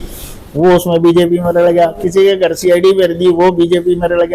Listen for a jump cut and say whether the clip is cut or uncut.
uncut